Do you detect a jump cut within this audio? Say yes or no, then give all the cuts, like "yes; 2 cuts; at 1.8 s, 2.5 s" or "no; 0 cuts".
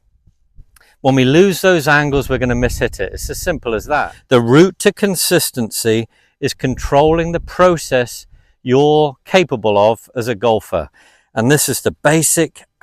yes; 1 cut; at 4.1 s